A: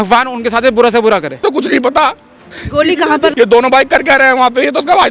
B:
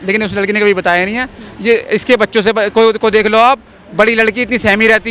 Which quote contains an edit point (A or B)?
A